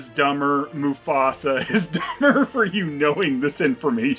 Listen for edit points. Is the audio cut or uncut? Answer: uncut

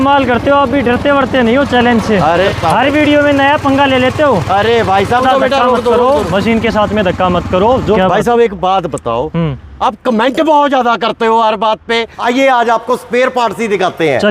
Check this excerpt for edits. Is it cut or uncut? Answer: cut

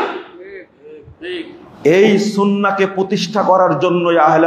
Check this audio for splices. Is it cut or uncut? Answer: uncut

